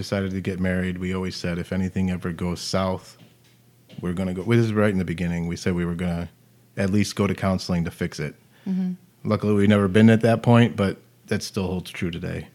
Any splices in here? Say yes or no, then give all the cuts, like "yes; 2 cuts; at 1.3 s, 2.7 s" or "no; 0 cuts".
no; 0 cuts